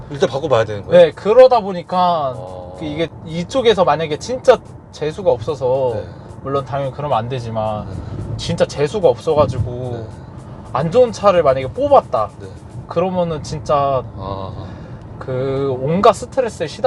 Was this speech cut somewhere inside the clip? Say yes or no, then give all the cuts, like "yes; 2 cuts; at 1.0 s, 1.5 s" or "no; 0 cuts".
no; 0 cuts